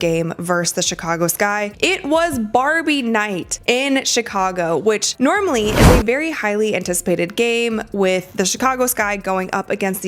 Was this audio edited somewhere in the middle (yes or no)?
no